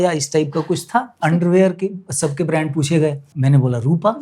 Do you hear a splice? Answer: yes; 2 cuts; at 1.1 s, 3.3 s

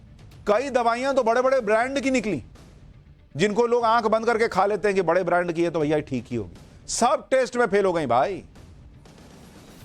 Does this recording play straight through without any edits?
no; 1 cut; at 4.7 s

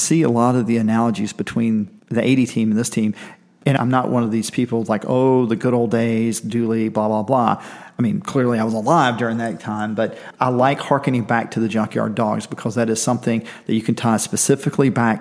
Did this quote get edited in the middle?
yes; 2 cuts; at 1.9 s, 3.8 s

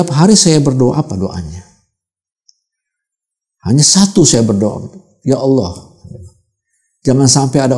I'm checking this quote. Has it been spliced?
no; 0 cuts

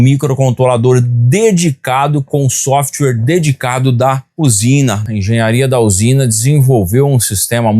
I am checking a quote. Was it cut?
yes; 1 cut; at 5.0 s

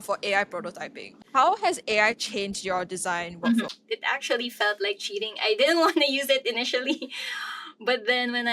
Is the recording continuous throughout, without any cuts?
no; 1 cut; at 3.8 s

